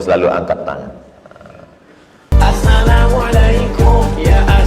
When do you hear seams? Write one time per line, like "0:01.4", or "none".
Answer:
0:02.4